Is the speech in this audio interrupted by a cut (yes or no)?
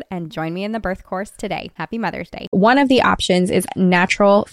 yes